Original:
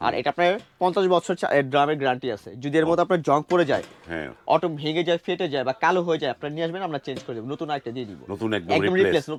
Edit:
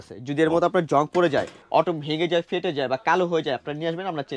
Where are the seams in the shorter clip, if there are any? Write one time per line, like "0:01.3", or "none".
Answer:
0:01.6